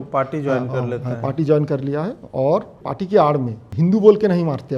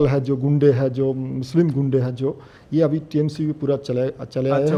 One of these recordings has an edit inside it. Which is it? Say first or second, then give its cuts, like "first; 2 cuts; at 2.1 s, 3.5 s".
first; 2 cuts; at 2.8 s, 3.6 s